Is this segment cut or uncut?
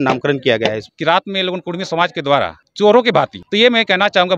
cut